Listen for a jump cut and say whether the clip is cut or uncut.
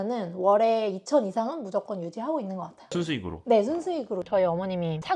cut